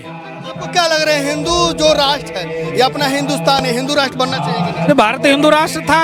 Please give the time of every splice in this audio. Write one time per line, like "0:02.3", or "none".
none